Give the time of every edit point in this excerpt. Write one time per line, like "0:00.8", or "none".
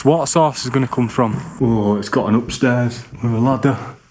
0:01.4
0:03.1

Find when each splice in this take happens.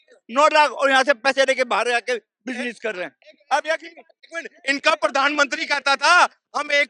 0:04.5

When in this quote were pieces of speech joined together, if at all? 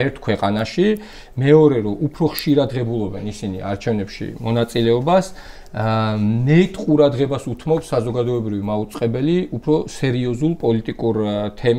none

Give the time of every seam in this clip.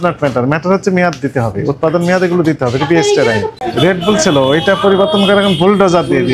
0:03.5

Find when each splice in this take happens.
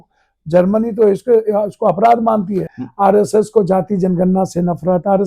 0:02.7

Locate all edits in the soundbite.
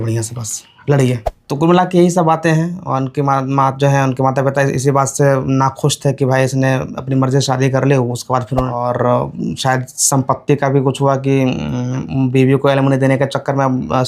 0:01.3
0:08.7

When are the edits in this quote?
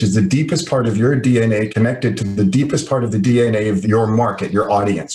0:03.8

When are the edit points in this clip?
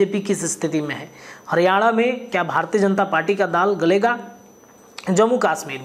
none

